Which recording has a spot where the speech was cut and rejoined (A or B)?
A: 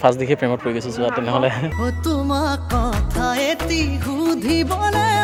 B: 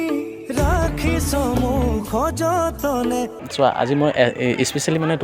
B